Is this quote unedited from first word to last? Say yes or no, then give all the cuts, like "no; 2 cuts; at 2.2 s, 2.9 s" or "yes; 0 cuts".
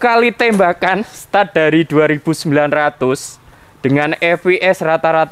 yes; 0 cuts